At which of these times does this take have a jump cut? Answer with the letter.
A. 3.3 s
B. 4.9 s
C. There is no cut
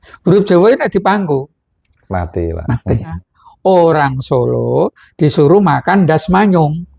A